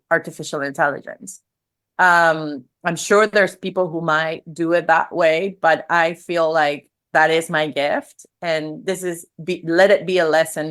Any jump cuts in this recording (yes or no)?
no